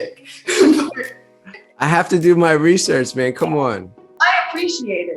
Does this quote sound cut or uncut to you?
cut